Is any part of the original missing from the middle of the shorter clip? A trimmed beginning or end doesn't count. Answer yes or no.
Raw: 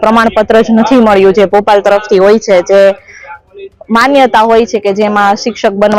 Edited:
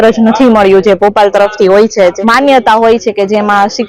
yes